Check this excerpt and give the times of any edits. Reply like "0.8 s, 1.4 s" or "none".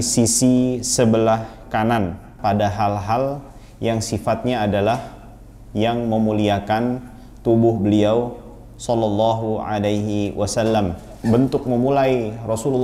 2.4 s, 11.1 s